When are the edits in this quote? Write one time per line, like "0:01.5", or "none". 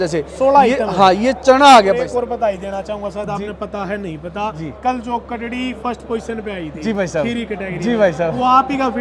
0:02.0